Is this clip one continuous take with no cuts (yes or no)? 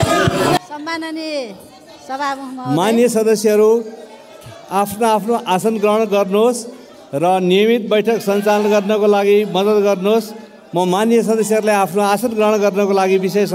yes